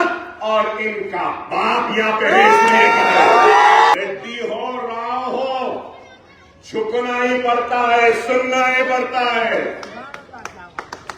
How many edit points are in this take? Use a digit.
1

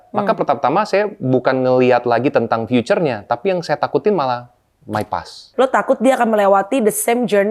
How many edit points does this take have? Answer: 1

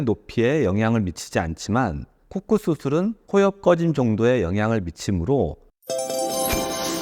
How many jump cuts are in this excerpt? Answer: 1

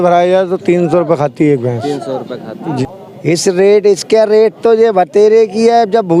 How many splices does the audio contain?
1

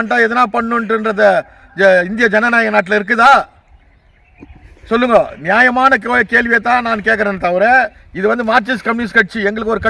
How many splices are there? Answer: 1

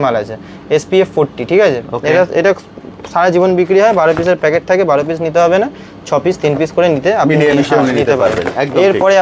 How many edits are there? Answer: 0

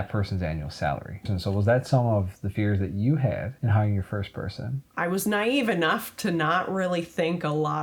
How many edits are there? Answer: 3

